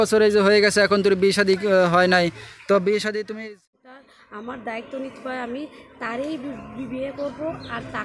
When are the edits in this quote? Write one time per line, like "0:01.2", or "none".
0:03.4